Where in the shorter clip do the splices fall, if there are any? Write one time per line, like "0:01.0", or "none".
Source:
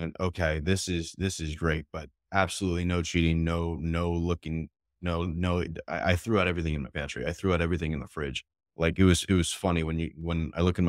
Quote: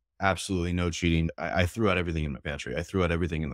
0:01.3